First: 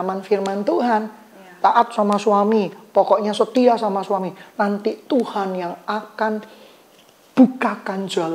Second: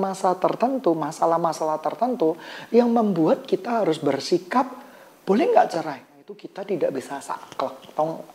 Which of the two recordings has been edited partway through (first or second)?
second